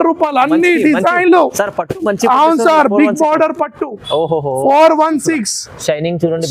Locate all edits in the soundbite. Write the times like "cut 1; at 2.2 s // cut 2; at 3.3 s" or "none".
none